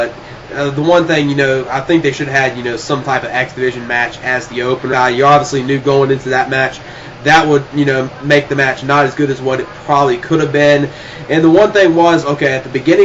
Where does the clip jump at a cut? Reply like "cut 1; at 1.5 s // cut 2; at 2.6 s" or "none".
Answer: none